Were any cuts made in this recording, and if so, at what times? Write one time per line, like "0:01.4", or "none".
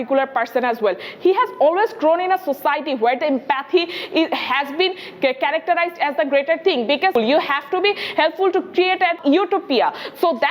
0:07.1
0:09.2

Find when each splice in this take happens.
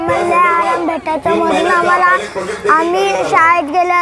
none

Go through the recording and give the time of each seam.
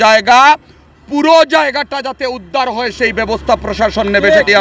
none

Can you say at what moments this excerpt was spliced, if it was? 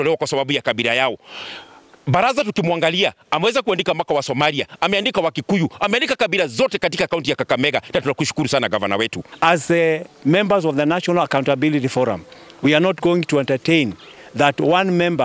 0:09.2

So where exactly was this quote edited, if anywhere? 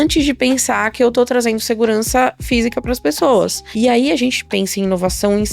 0:03.6

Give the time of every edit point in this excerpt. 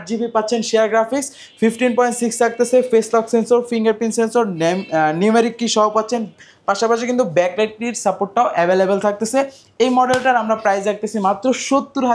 none

